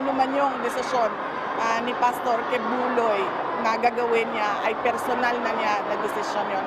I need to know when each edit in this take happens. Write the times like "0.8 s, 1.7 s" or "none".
none